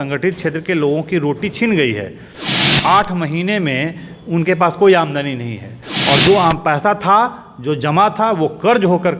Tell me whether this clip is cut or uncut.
uncut